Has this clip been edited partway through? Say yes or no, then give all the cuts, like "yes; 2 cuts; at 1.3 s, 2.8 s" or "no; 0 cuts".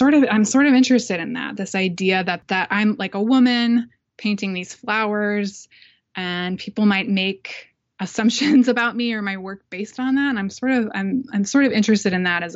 no; 0 cuts